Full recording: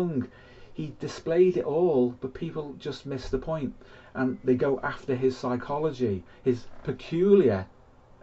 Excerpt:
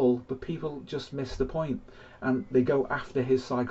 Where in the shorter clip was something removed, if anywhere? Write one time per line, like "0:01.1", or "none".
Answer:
none